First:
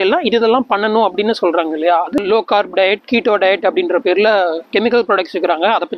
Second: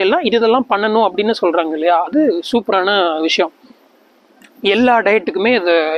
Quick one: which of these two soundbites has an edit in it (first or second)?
first